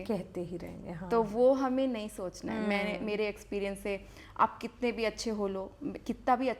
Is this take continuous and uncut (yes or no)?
yes